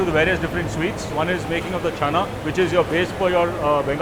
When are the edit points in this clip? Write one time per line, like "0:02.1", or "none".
none